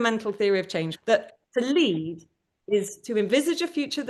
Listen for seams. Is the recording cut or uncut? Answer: cut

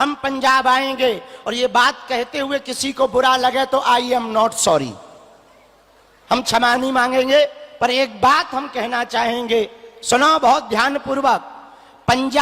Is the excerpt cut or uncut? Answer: uncut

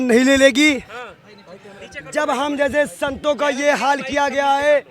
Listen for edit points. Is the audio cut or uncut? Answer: uncut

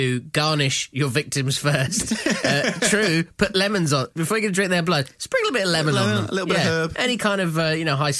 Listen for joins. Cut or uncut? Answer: uncut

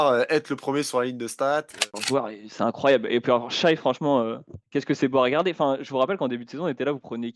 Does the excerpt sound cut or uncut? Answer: cut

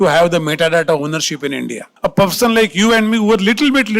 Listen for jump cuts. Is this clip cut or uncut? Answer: cut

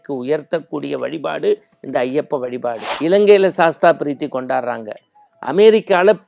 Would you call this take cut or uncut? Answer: cut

